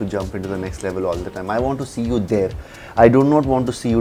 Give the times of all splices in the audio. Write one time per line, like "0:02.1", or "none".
none